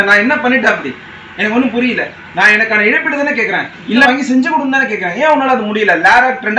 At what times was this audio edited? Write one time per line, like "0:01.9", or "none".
0:04.1